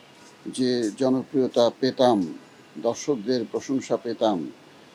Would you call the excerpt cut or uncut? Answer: uncut